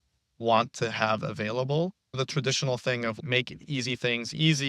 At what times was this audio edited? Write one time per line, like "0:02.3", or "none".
0:02.2
0:03.2